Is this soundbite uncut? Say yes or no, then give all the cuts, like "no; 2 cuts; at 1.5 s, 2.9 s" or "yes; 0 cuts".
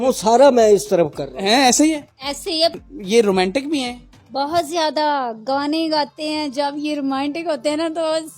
no; 1 cut; at 2.8 s